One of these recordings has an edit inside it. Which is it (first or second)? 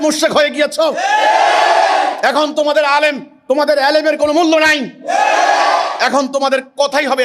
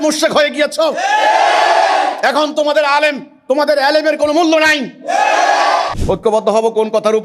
second